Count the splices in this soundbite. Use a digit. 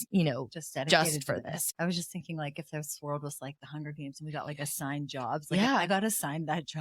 1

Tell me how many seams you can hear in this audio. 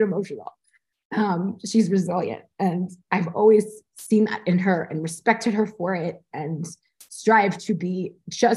0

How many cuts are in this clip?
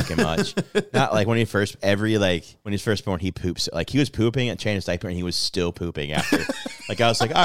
1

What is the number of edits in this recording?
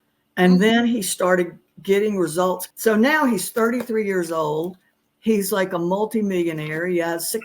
1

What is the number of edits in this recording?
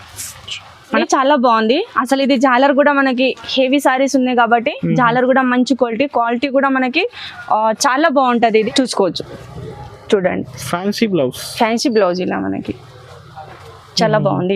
2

